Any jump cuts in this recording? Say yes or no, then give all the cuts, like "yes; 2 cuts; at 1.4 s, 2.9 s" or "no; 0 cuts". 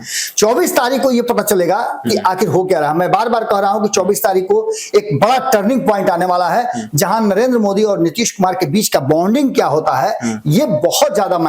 no; 0 cuts